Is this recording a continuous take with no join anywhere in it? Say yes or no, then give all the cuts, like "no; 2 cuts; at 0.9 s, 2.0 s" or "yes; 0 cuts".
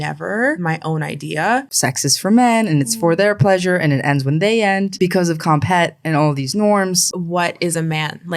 no; 3 cuts; at 1.7 s, 4.9 s, 7.0 s